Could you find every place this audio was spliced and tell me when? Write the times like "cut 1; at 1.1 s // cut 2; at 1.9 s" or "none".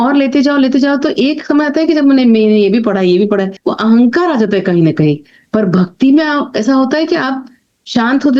cut 1; at 3.6 s